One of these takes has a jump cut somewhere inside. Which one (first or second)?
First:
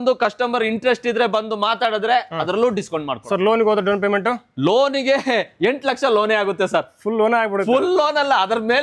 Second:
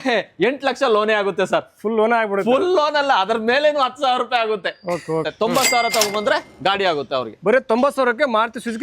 second